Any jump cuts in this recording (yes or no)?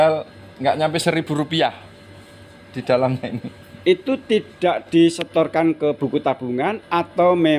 no